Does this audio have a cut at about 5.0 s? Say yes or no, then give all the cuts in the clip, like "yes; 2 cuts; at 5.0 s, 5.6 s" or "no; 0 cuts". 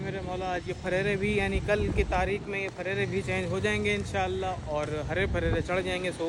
no; 0 cuts